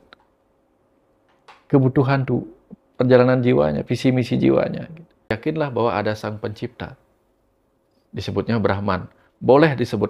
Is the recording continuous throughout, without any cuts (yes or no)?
no